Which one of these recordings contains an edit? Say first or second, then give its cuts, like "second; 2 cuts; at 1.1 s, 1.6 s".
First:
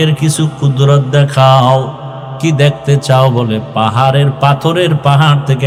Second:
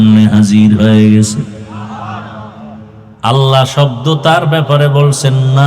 second; 1 cut; at 3.0 s